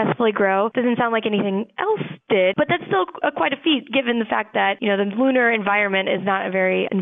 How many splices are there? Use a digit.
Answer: 1